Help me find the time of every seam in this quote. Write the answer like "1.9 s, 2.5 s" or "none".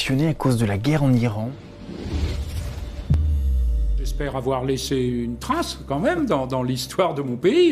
1.4 s, 4.4 s

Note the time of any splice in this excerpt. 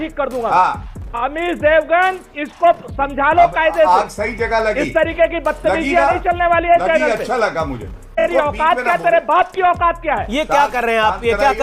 1.2 s, 8.2 s

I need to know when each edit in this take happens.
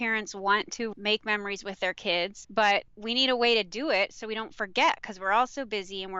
0.9 s, 2.4 s, 3.0 s

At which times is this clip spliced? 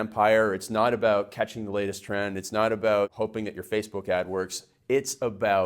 3.1 s

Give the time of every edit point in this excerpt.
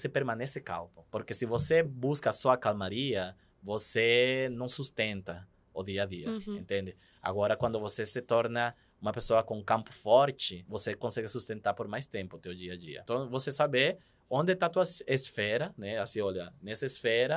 1.0 s, 10.7 s, 12.9 s

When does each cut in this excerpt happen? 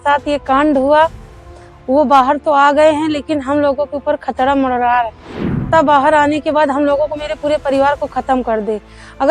5.7 s

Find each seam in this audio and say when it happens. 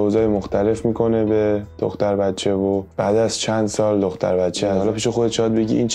4.8 s

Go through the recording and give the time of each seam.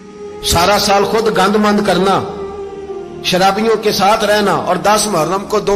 none

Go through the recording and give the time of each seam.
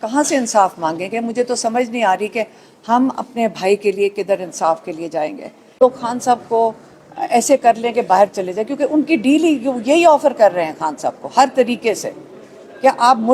5.7 s

